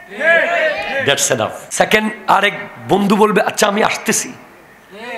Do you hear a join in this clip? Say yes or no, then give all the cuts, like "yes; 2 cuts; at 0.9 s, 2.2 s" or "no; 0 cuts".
yes; 1 cut; at 1.6 s